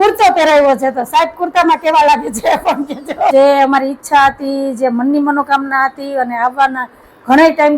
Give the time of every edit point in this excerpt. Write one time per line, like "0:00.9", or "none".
0:03.3